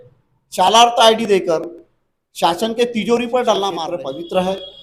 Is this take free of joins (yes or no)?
no